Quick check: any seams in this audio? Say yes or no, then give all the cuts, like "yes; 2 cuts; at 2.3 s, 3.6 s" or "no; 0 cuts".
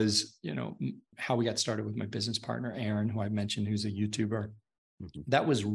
yes; 1 cut; at 1.1 s